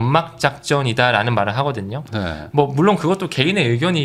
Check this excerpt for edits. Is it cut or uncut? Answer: uncut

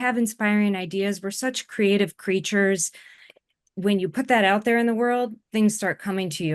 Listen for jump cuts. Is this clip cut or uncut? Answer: cut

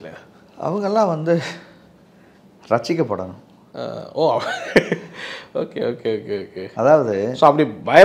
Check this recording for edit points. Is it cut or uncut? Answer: uncut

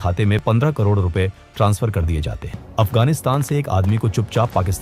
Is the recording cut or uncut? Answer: cut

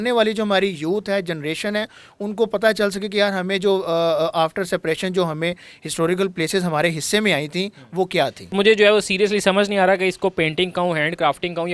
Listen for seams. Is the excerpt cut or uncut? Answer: cut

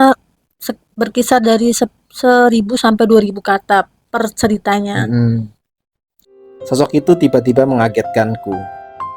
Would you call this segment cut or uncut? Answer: cut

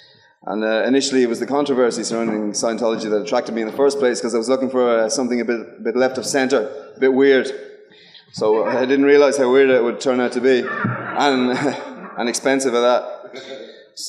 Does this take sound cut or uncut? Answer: cut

